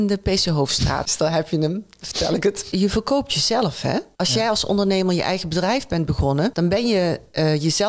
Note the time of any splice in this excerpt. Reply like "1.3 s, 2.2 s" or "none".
1.1 s, 2.6 s, 4.1 s, 6.5 s